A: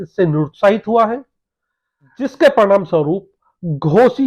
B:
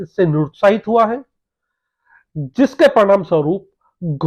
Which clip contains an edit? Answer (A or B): A